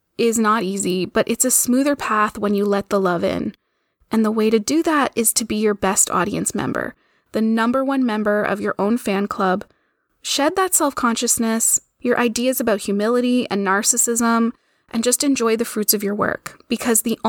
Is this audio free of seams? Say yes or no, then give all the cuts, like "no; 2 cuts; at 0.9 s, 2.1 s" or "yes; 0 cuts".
yes; 0 cuts